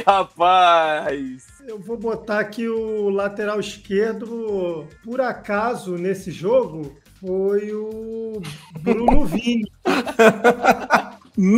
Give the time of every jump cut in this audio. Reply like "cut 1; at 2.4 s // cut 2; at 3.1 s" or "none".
none